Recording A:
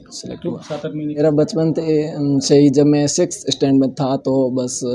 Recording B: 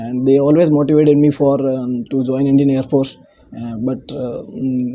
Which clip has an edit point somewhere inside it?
A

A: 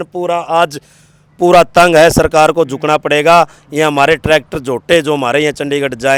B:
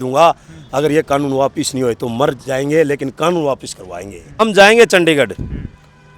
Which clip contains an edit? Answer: B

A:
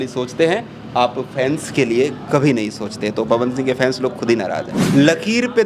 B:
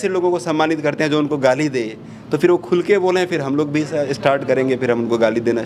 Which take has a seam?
A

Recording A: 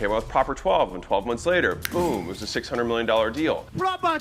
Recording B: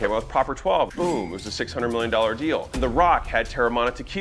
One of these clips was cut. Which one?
B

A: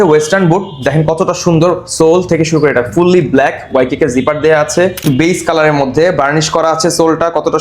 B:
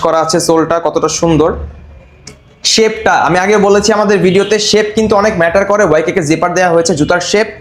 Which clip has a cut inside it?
A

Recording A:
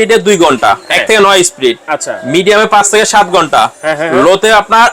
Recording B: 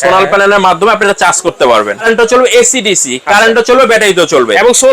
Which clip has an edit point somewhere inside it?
B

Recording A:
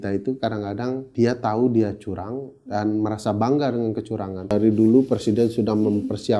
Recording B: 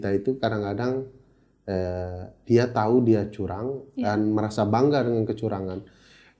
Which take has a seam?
A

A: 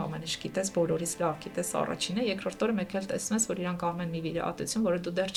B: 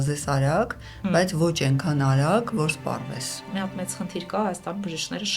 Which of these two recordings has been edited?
B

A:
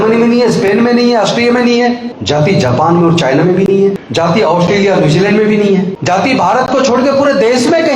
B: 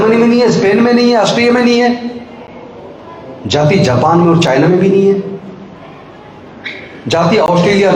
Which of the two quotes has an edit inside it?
A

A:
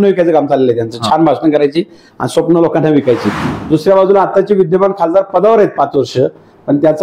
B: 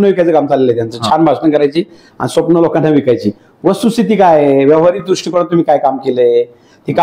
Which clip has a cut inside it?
A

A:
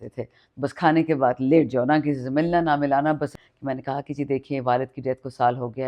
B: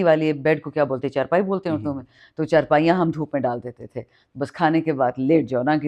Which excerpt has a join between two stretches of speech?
A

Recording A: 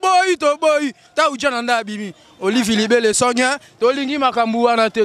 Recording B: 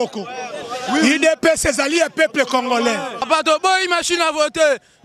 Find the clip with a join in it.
B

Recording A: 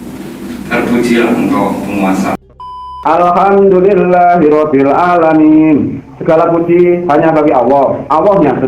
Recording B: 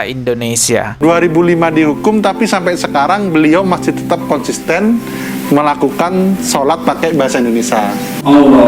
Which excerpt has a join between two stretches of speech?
A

